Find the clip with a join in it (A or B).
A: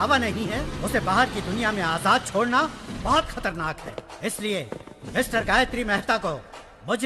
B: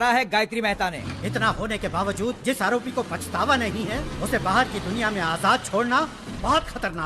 B